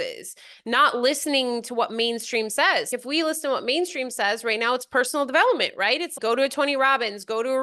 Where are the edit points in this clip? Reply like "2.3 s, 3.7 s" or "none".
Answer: 2.9 s, 6.1 s